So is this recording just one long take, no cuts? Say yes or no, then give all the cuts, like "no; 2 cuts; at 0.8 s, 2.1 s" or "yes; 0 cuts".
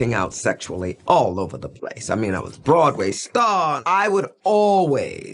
yes; 0 cuts